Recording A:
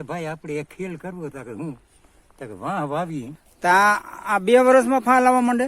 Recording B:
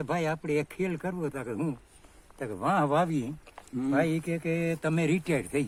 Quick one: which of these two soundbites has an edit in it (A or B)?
A